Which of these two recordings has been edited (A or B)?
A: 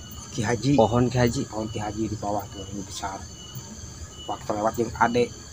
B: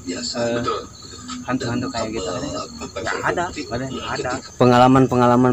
B